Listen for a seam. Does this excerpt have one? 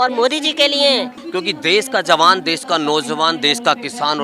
yes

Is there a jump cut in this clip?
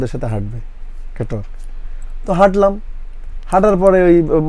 no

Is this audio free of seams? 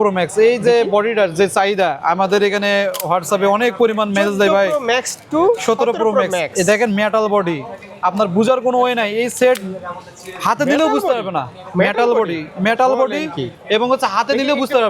yes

